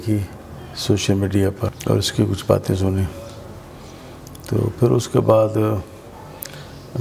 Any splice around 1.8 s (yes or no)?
yes